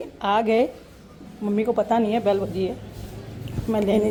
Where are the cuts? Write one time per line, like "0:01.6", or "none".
none